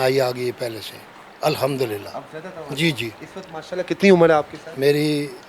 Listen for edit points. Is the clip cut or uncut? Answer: uncut